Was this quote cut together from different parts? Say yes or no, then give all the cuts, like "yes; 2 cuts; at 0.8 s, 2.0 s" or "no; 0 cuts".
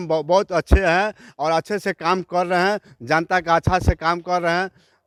no; 0 cuts